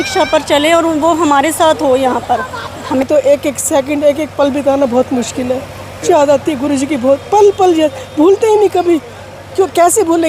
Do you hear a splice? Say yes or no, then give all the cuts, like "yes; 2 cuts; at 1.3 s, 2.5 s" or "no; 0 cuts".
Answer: yes; 2 cuts; at 3.0 s, 6.0 s